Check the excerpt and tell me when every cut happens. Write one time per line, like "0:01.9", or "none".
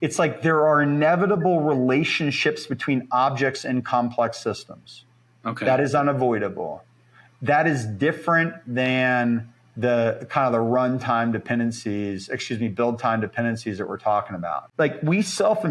0:14.6